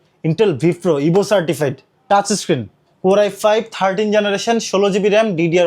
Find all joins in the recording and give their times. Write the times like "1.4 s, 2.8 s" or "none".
none

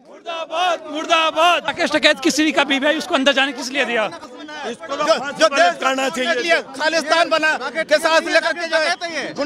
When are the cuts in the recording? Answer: 1.7 s, 4.2 s

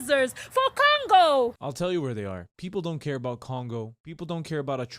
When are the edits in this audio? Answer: 1.6 s, 2.5 s, 4.2 s

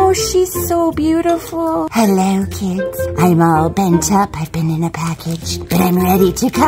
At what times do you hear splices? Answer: 1.9 s

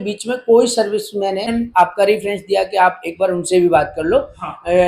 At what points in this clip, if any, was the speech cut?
1.5 s

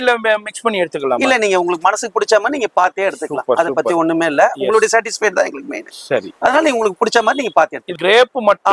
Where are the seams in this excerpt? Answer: 7.8 s

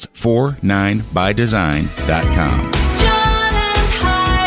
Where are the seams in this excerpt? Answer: none

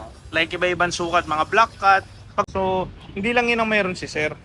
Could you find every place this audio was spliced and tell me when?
2.5 s

